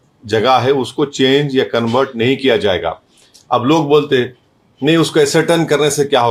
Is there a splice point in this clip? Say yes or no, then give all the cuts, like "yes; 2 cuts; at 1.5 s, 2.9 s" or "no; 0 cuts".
no; 0 cuts